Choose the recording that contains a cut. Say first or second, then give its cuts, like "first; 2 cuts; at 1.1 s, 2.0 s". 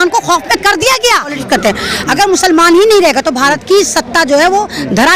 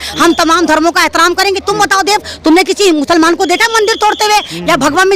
first; 1 cut; at 1.4 s